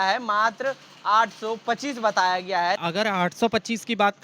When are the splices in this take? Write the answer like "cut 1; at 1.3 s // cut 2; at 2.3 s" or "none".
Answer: cut 1; at 2.8 s